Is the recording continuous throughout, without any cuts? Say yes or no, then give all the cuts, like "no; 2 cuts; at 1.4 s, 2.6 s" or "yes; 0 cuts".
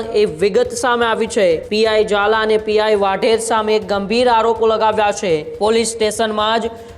no; 2 cuts; at 1.7 s, 5.5 s